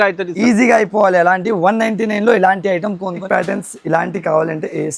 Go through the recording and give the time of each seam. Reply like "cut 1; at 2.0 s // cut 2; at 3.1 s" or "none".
cut 1; at 3.2 s